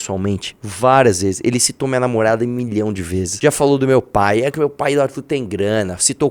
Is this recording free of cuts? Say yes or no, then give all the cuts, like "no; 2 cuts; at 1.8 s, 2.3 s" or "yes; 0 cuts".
no; 1 cut; at 3.3 s